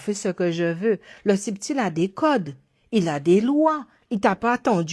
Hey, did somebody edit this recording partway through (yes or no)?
no